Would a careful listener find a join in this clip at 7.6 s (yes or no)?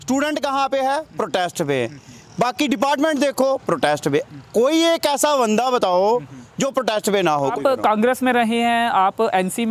yes